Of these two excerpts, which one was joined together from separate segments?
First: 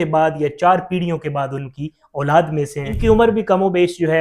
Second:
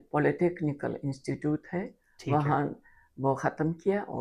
first; 1 cut; at 3.0 s

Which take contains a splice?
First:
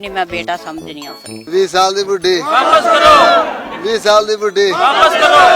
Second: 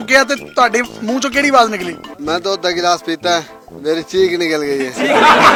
first; 1 cut; at 1.5 s

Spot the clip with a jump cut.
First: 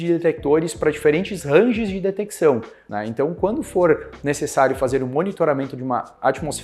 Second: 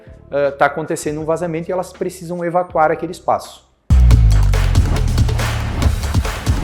first; 1 cut; at 2.8 s

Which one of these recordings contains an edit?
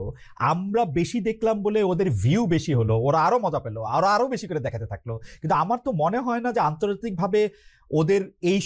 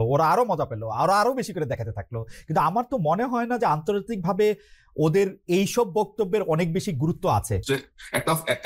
second; 1 cut; at 7.5 s

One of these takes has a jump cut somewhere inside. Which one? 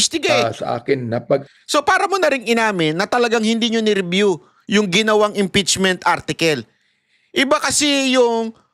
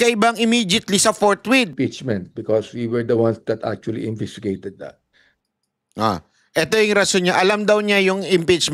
second; 1 cut; at 1.7 s

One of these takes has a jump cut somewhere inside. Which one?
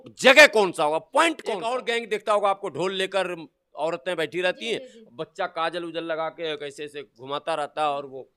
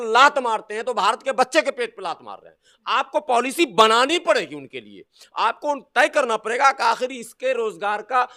first; 1 cut; at 1.7 s

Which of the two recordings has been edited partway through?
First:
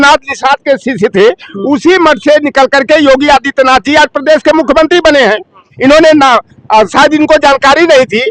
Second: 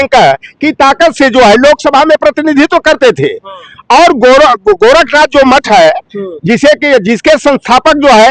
first; 1 cut; at 5.6 s

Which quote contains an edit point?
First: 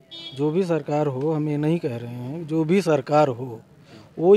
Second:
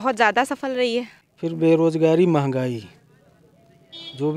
second; 1 cut; at 1.2 s

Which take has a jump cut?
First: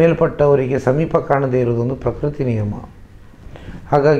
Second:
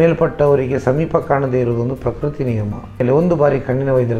second; 1 cut; at 3.0 s

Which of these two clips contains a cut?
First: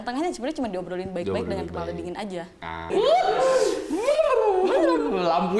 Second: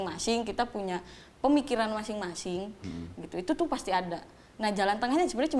first; 1 cut; at 2.9 s

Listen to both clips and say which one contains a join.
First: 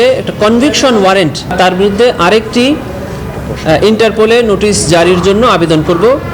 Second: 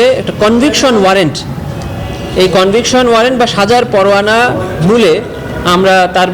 first; 1 cut; at 1.5 s

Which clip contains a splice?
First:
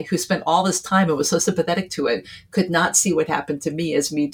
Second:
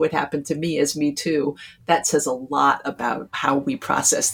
second; 1 cut; at 3.3 s

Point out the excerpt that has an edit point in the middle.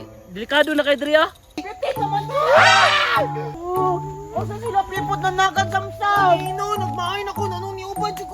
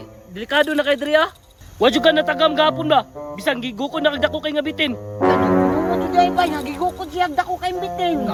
first; 2 cuts; at 1.6 s, 3.5 s

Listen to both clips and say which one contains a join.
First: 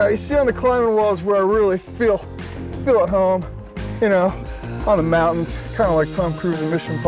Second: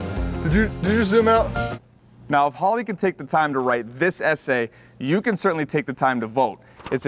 second; 1 cut; at 1.6 s

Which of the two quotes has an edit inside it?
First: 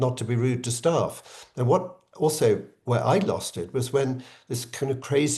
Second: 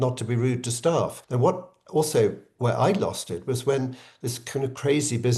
second; 1 cut; at 1.2 s

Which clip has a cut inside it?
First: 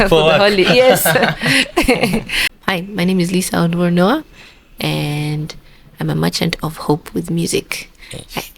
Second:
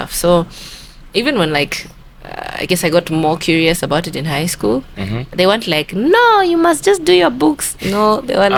first; 1 cut; at 2.5 s

